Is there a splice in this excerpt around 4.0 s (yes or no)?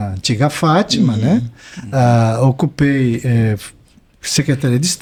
no